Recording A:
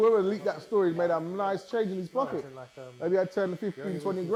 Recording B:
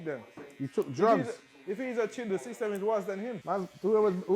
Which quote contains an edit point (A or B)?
B